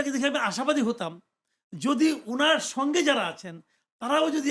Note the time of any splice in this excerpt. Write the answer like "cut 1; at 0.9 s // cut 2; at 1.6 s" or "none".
none